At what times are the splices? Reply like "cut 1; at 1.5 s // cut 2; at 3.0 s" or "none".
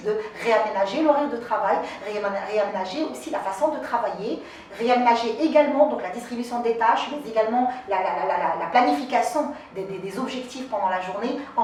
none